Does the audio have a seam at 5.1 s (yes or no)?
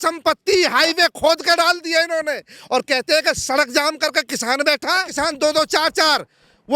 yes